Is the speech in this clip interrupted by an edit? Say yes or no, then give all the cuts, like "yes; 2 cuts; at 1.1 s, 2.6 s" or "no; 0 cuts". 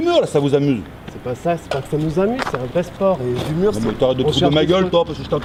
no; 0 cuts